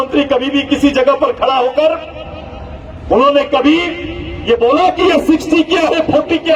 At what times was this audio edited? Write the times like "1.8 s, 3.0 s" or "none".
none